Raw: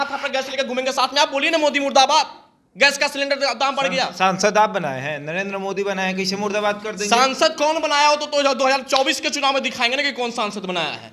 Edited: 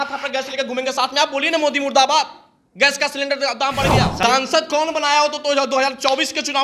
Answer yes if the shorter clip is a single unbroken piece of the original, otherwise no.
no